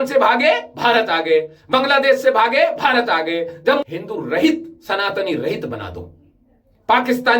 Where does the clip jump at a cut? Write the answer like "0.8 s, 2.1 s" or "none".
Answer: 3.8 s